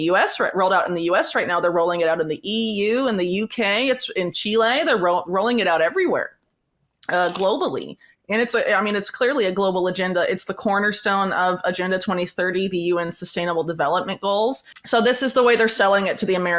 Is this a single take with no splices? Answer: no; 1 cut; at 14.7 s

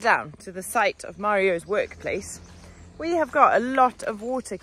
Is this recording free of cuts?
yes; 0 cuts

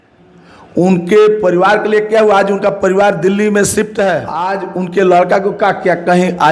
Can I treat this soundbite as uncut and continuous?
no; 1 cut; at 4.6 s

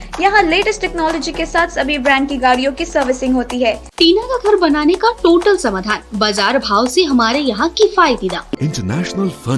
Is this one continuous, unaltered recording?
no; 2 cuts; at 3.9 s, 8.6 s

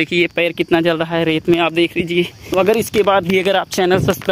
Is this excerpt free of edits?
no; 1 cut; at 2.4 s

